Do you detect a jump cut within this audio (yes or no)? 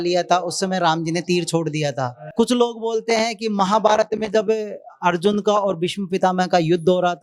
yes